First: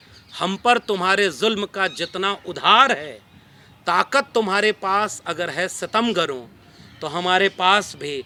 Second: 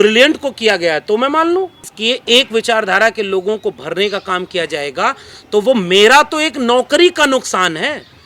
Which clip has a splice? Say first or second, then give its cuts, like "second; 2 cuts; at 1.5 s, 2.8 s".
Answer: second; 1 cut; at 1.9 s